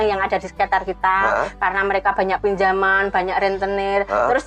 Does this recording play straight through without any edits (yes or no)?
yes